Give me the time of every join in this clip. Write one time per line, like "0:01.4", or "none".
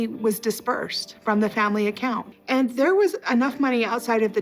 0:02.3